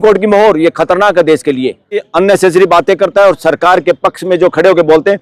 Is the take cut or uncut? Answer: cut